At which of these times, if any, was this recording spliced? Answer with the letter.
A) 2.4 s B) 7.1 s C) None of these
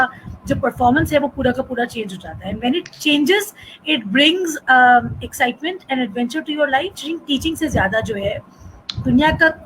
B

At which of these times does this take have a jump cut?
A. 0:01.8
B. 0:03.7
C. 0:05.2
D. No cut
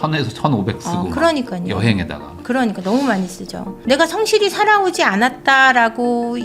B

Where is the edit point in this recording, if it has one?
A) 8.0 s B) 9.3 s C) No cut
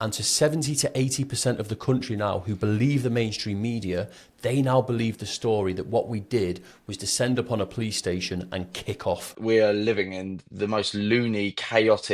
B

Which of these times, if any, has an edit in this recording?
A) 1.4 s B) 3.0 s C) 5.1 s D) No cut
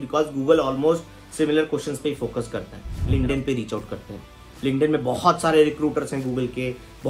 B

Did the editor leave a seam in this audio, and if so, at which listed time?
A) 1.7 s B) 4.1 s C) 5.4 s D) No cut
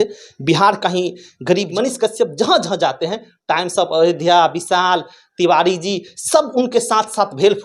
A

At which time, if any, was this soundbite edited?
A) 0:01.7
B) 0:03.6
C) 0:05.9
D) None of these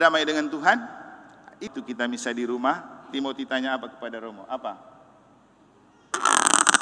A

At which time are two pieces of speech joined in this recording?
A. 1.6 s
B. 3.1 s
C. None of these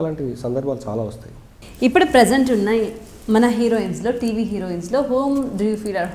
A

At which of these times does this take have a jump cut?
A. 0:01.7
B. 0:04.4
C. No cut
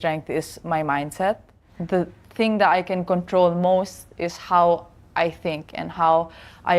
A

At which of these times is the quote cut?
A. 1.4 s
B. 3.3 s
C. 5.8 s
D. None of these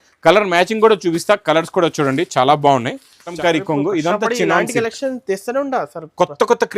B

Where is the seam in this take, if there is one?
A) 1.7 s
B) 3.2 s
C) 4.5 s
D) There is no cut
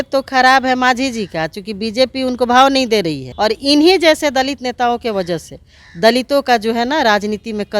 B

